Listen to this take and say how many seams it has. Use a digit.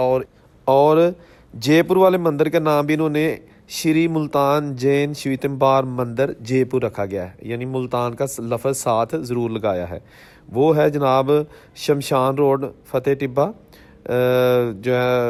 0